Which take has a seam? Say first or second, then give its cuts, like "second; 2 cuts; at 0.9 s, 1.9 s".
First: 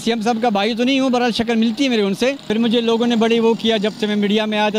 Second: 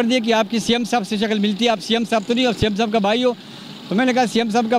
first; 1 cut; at 2.5 s